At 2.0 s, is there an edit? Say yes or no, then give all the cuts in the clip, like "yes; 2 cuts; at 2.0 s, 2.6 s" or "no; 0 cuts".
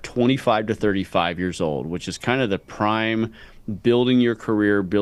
no; 0 cuts